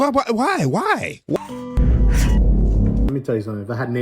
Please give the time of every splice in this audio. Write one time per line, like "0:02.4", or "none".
0:01.4